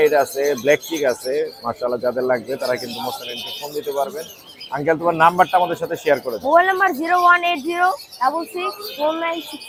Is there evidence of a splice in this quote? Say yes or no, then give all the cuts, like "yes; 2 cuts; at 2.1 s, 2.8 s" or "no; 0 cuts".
no; 0 cuts